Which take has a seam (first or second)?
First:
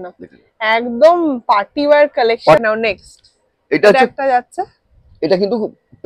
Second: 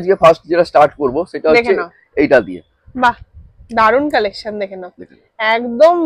first